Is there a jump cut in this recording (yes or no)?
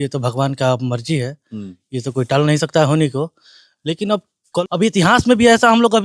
yes